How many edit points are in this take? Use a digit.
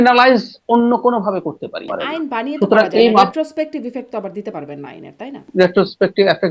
2